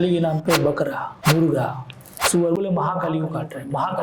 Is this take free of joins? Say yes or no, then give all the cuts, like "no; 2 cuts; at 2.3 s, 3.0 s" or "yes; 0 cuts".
no; 1 cut; at 1.1 s